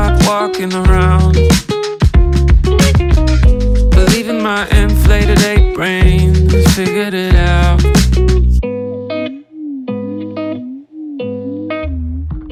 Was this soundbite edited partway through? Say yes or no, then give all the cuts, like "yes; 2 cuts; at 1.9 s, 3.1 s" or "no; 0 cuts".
no; 0 cuts